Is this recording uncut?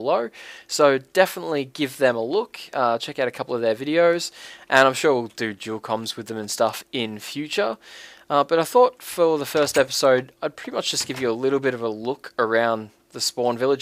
yes; 0 cuts

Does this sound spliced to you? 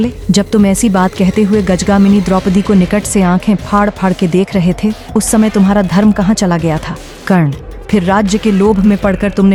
no; 0 cuts

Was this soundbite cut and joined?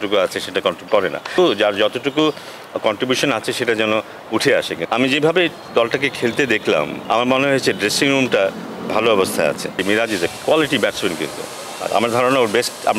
yes; 4 cuts; at 1.3 s, 4.8 s, 7.0 s, 9.7 s

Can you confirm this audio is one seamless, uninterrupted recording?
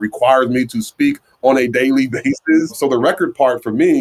no; 1 cut; at 2.8 s

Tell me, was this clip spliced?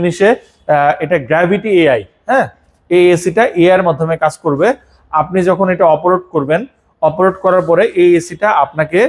no; 0 cuts

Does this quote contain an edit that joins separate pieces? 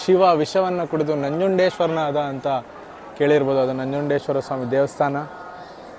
no; 0 cuts

